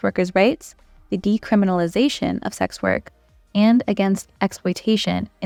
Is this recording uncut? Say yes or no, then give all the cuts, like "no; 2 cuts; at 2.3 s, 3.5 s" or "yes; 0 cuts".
yes; 0 cuts